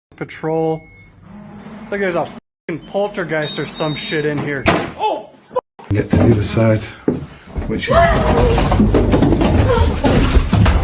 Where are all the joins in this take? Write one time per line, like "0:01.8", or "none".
0:06.0

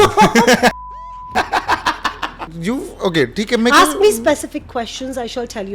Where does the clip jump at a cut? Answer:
0:02.5

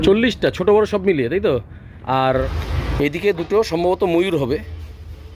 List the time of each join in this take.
0:02.4

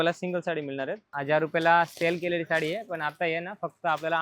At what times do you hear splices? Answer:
0:01.1

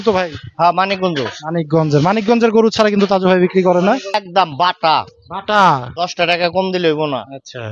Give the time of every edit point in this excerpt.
0:04.1

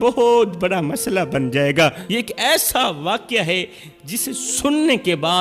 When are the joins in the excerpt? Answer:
0:02.0

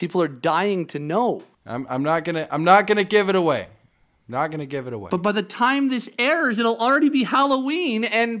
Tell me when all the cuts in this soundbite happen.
none

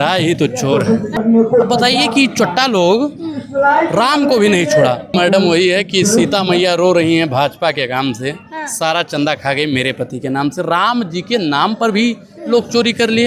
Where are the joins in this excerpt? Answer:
0:01.1
0:05.1

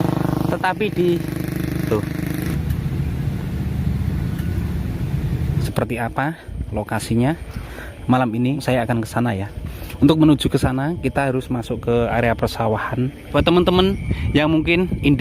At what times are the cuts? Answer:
0:02.5
0:05.7
0:08.6
0:13.2

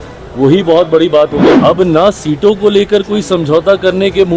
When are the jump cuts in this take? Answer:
0:01.5

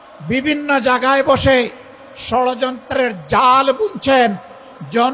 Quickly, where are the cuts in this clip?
none

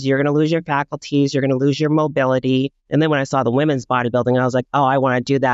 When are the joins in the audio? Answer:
0:02.8

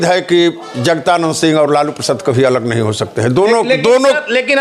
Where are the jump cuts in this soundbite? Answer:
none

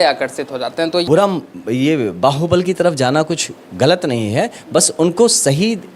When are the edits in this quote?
0:01.0

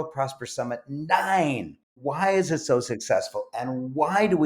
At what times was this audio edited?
0:01.9

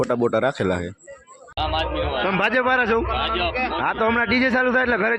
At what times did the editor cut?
0:01.5

